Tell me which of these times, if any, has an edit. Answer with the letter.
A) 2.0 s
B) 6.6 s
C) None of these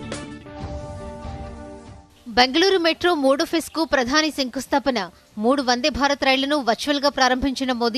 A